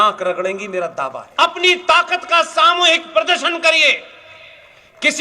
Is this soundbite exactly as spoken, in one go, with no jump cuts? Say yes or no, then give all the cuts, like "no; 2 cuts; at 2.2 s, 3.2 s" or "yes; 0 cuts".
no; 1 cut; at 1.2 s